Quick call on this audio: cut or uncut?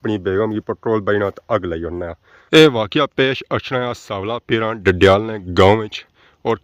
uncut